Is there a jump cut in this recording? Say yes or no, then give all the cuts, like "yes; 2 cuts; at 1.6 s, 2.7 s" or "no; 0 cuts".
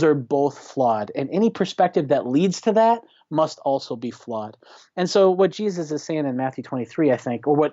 no; 0 cuts